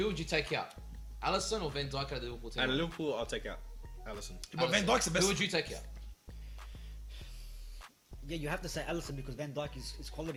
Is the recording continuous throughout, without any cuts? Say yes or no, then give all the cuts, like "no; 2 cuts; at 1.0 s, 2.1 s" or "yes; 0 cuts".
yes; 0 cuts